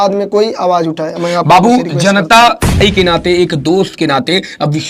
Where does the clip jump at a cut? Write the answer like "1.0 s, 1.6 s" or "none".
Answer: 2.8 s